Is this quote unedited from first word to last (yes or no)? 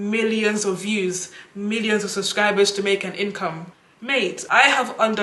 yes